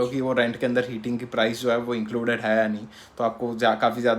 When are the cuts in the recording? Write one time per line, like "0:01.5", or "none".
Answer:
none